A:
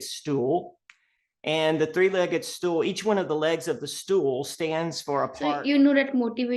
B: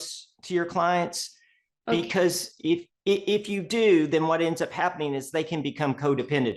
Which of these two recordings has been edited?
A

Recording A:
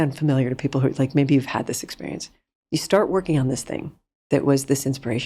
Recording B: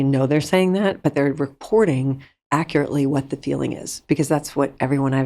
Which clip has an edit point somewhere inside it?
B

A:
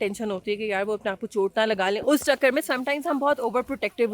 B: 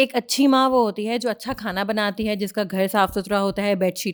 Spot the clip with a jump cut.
A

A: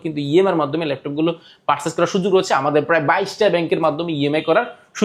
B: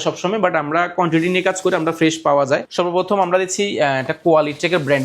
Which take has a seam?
B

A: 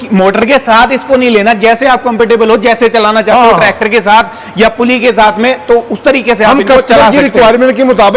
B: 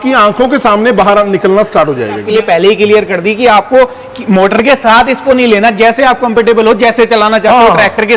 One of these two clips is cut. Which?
B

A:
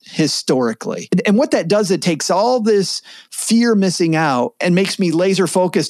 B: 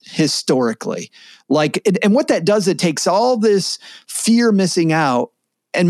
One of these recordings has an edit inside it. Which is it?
A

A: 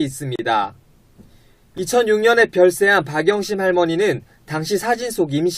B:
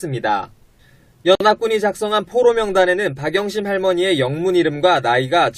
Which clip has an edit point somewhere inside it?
A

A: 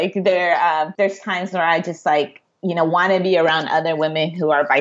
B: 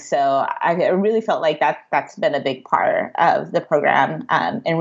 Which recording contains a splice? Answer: A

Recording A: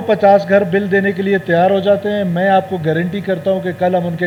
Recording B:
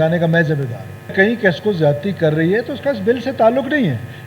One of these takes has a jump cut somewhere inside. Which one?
B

